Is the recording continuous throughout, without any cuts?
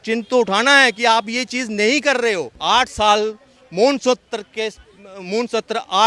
no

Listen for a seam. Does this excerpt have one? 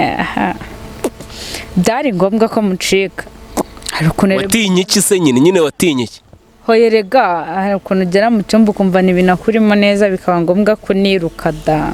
no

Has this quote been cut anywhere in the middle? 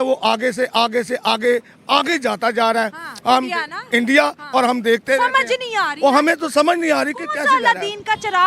no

